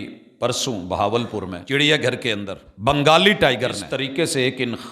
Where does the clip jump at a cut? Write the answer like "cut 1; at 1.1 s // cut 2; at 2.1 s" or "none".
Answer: cut 1; at 1.6 s // cut 2; at 2.6 s // cut 3; at 3.9 s